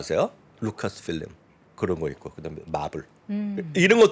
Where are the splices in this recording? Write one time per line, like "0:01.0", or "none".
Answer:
none